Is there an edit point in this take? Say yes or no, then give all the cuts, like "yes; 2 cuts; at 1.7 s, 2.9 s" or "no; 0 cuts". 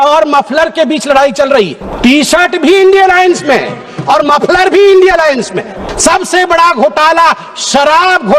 yes; 2 cuts; at 1.8 s, 5.9 s